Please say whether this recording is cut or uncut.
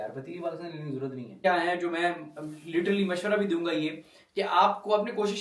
cut